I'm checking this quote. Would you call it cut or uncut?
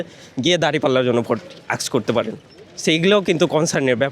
uncut